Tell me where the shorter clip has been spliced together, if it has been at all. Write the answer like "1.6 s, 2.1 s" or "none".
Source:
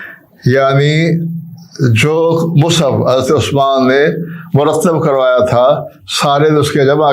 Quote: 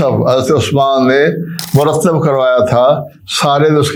none